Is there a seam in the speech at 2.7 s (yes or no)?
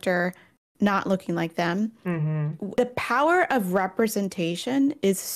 yes